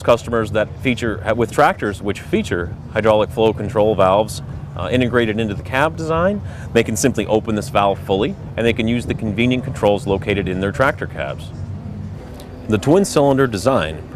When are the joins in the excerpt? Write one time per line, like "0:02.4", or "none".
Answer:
none